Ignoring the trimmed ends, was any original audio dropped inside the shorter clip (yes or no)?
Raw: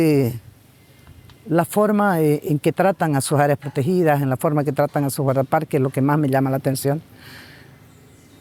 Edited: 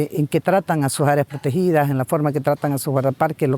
no